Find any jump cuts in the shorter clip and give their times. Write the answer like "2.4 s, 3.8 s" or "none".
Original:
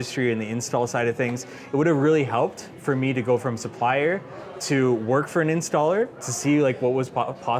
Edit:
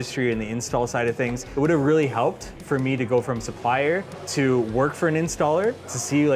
1.4 s, 4.2 s